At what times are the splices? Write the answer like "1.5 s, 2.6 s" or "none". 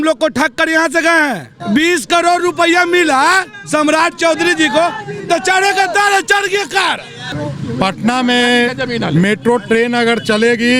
1.5 s, 7.3 s